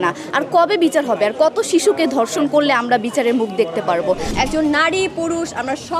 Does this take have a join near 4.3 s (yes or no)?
yes